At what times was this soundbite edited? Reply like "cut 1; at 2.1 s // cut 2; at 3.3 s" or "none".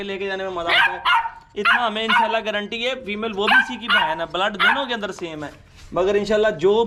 none